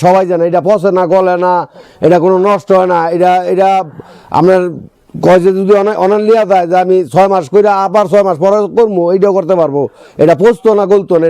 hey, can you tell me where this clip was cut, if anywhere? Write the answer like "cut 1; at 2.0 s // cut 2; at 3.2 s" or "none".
none